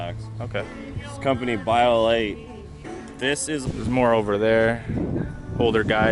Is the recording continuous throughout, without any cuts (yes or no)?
no